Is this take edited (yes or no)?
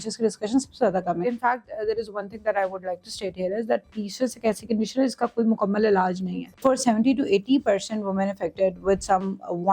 yes